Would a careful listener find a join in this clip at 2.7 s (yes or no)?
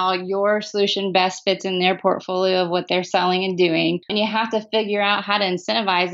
no